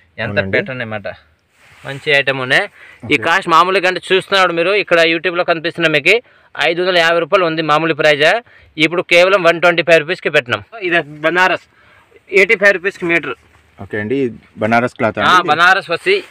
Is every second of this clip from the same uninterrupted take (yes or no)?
no